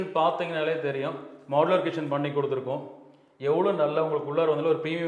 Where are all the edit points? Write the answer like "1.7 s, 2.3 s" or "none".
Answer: none

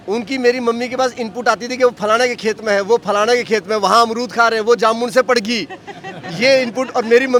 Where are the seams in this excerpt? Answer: none

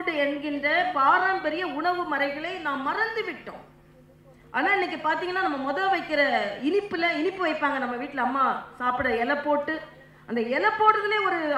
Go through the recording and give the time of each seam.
none

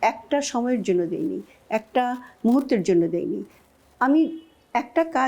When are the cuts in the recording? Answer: none

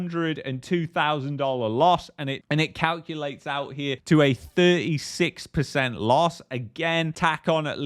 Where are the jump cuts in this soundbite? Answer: none

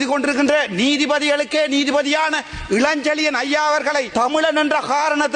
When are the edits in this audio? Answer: 4.1 s

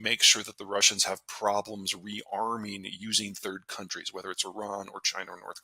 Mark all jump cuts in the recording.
none

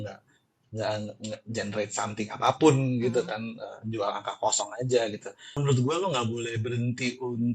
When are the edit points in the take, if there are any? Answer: 5.6 s

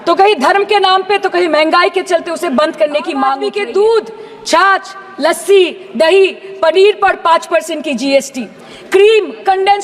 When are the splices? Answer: 3.4 s

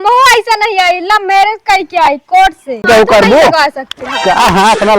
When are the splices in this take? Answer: 2.8 s

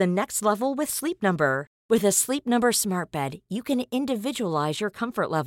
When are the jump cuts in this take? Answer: none

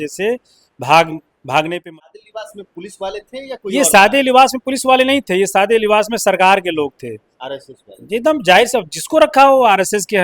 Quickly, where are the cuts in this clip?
1.8 s

